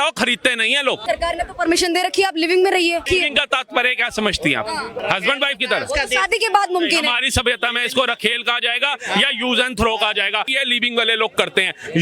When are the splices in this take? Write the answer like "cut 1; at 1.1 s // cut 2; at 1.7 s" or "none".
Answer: cut 1; at 1.0 s // cut 2; at 3.0 s // cut 3; at 4.9 s // cut 4; at 10.5 s